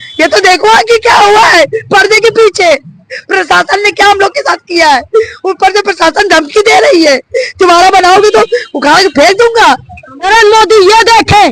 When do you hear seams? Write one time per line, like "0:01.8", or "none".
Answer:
0:10.1